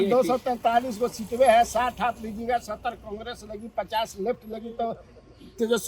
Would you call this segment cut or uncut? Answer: uncut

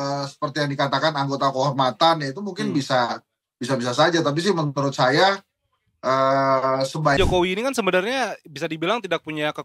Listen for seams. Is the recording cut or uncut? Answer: cut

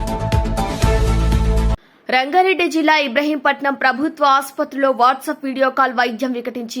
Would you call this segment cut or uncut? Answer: cut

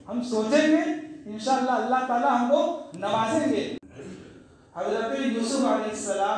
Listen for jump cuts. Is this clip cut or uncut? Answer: cut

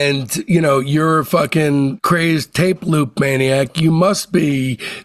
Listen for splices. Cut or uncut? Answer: uncut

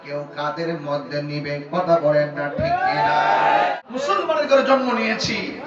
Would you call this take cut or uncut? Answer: cut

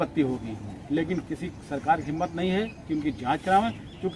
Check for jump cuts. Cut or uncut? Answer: uncut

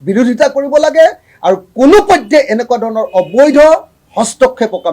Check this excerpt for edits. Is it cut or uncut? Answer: cut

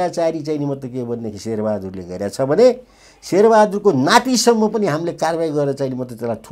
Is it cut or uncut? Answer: uncut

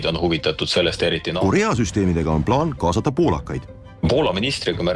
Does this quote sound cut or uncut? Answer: cut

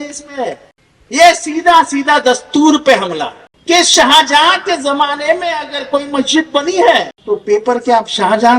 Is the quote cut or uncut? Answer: cut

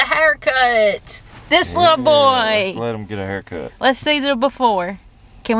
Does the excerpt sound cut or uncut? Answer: uncut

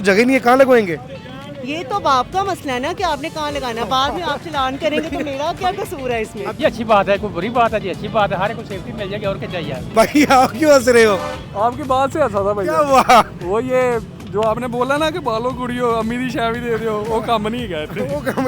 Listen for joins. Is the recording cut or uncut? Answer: cut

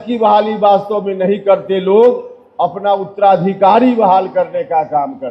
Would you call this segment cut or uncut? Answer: uncut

